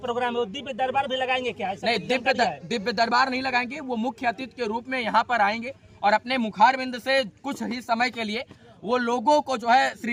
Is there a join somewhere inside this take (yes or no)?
no